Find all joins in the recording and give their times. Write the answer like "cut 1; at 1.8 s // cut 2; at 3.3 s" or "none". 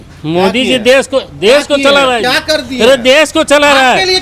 none